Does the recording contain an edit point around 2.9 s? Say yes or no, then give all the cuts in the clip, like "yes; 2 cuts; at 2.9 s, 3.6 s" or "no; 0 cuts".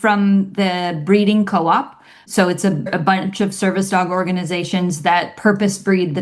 yes; 1 cut; at 2.9 s